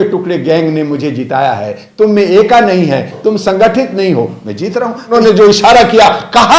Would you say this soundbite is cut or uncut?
cut